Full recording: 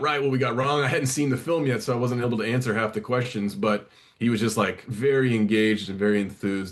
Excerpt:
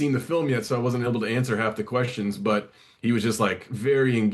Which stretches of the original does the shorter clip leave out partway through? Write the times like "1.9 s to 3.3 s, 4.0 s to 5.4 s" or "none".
none